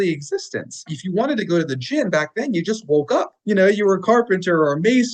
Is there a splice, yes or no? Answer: yes